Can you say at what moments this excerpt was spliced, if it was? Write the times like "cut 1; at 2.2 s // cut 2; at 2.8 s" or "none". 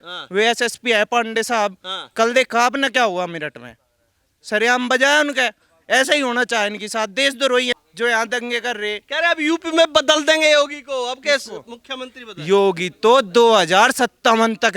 cut 1; at 7.9 s